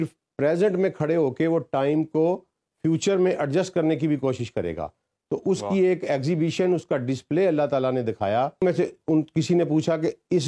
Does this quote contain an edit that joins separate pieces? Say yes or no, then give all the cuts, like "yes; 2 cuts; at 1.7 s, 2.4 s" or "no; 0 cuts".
yes; 1 cut; at 8.6 s